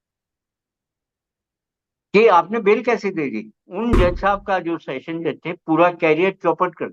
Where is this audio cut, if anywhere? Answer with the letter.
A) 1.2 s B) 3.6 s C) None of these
B